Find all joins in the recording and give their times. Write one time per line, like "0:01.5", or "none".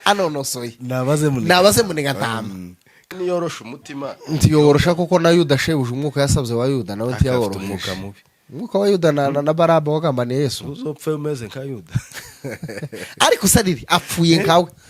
0:03.0